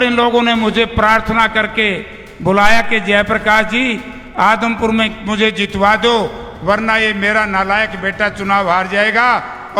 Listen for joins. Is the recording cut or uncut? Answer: uncut